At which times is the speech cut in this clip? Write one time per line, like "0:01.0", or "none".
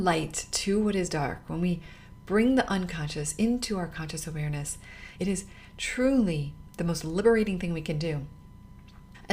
0:05.1